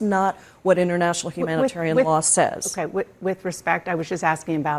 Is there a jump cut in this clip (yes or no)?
no